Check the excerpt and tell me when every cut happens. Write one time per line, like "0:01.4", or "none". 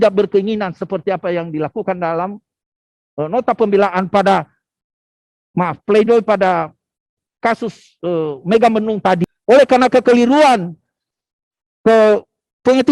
0:09.2